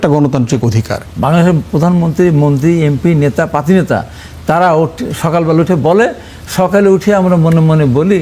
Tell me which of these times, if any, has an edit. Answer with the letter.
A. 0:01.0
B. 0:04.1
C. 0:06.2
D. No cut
A